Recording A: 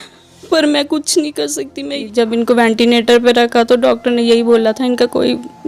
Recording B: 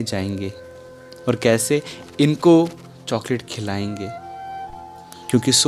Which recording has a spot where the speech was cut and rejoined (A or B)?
A